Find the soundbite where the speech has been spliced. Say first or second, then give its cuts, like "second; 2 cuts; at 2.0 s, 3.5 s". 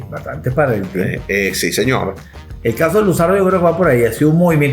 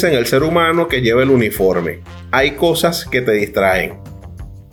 first; 1 cut; at 2.4 s